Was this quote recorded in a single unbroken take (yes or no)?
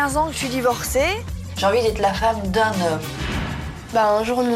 no